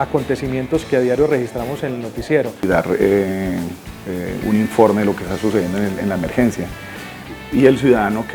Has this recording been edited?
yes; 1 cut; at 2.6 s

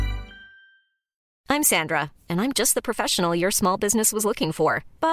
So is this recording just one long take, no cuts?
no; 1 cut; at 1.2 s

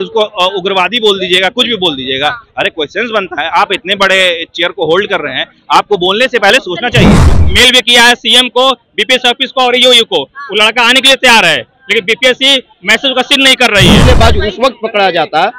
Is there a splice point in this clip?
yes; 2 cuts; at 7.3 s, 14.0 s

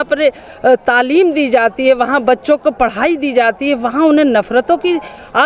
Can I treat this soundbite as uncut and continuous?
yes; 0 cuts

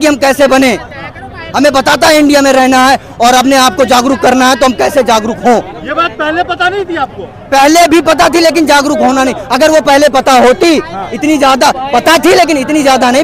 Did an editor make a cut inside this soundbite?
no; 0 cuts

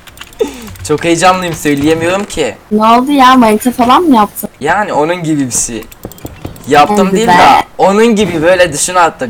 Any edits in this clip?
yes; 2 cuts; at 2.6 s, 4.4 s

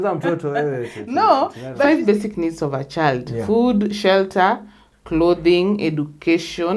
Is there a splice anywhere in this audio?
yes; 1 cut; at 1.8 s

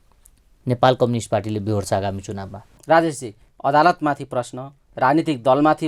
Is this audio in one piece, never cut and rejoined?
no; 1 cut; at 2.8 s

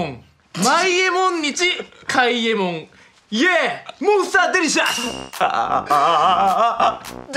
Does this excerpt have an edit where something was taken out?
no; 0 cuts

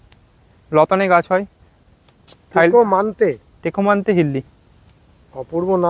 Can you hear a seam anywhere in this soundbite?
no; 0 cuts

